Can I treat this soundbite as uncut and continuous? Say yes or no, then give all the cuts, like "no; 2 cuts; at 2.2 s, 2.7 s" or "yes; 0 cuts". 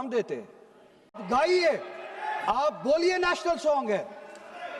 no; 1 cut; at 1.2 s